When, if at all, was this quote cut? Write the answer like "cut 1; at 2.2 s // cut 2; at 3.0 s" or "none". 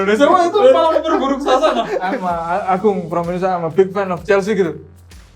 cut 1; at 2.0 s

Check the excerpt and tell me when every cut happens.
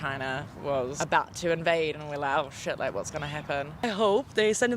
cut 1; at 3.7 s

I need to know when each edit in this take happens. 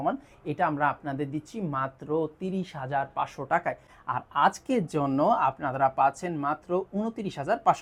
none

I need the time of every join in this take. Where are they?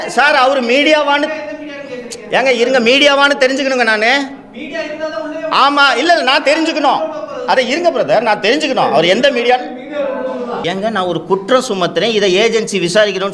cut 1; at 10.6 s

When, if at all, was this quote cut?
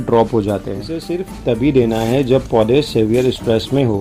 cut 1; at 1.1 s

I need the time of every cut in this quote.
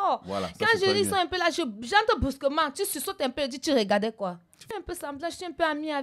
cut 1; at 4.7 s

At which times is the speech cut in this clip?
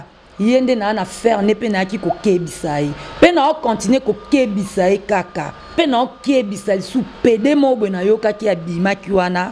cut 1; at 5.7 s

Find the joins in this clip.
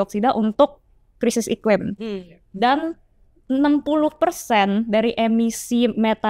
none

